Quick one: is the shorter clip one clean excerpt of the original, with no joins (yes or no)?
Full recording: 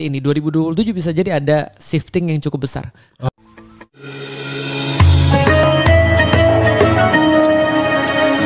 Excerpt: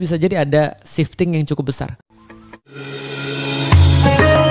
no